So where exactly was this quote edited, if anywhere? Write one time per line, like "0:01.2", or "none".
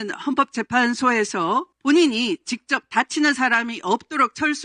0:01.7